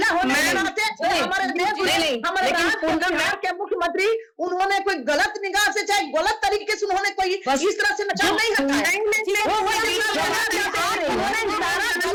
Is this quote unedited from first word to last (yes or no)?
yes